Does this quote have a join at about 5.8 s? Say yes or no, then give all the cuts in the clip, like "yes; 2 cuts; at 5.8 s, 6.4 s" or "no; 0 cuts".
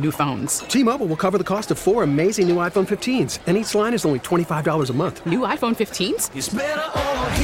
no; 0 cuts